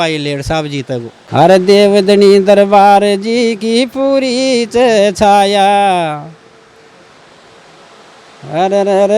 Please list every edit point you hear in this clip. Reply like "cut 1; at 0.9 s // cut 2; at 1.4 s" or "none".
cut 1; at 1.2 s